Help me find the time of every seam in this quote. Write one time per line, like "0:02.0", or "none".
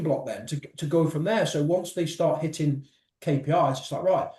none